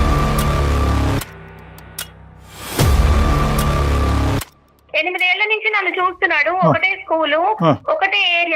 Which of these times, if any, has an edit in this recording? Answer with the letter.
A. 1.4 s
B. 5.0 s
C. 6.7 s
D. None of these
B